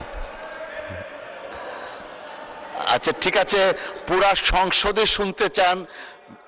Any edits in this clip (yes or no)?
no